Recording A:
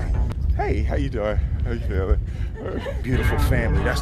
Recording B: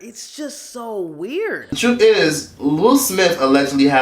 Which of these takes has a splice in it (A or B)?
B